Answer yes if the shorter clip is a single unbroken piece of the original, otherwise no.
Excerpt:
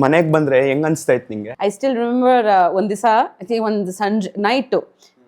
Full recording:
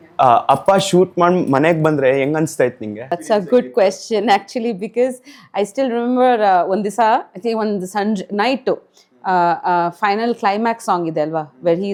no